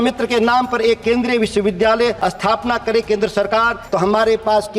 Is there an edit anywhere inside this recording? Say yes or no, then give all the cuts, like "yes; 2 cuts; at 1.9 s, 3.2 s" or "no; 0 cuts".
yes; 2 cuts; at 2.2 s, 3.8 s